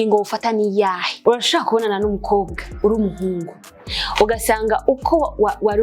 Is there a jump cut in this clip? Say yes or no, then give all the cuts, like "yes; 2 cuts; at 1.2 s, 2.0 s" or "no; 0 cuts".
yes; 1 cut; at 1.1 s